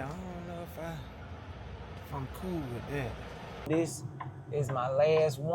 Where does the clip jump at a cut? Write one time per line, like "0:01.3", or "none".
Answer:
0:03.7